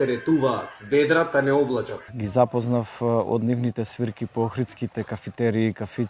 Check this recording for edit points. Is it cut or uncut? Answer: cut